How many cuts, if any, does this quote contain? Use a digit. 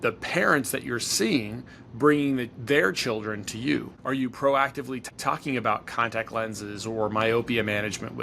2